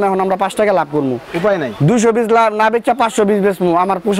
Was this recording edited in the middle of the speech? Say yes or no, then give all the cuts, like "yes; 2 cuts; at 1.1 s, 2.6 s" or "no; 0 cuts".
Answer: no; 0 cuts